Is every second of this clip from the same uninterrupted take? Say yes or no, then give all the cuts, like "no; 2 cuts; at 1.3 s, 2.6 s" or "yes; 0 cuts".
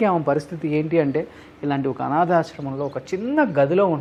yes; 0 cuts